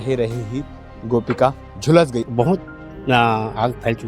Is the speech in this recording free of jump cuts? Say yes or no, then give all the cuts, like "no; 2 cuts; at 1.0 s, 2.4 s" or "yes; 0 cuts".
no; 1 cut; at 2.2 s